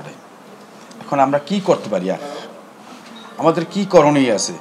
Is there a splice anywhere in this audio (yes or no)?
no